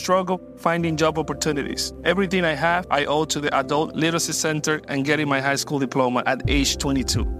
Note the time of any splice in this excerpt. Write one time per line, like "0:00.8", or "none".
none